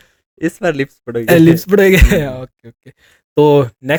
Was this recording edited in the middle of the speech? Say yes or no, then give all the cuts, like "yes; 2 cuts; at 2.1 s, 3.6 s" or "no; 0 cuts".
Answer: no; 0 cuts